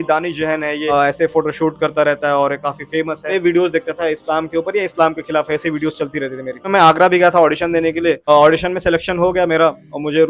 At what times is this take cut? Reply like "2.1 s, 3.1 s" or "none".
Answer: 0.9 s, 3.3 s, 6.6 s

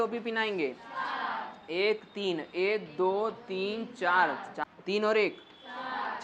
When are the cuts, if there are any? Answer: 4.6 s

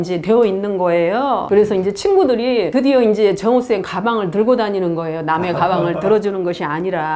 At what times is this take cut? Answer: none

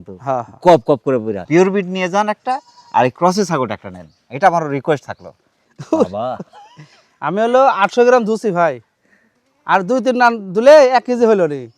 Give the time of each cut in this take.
1.4 s, 5.5 s

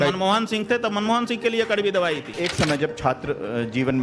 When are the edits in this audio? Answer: 2.3 s

